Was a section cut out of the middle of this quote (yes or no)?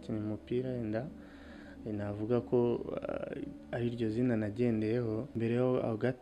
yes